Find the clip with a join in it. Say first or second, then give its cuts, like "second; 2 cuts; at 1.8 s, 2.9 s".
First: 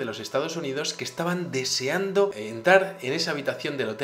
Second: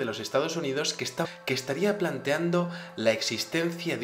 first; 1 cut; at 1.2 s